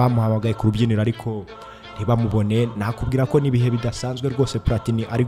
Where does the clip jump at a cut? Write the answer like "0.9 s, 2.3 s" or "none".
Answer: none